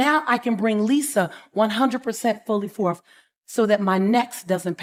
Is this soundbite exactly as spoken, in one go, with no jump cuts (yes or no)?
yes